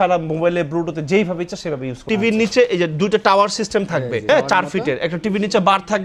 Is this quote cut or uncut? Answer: cut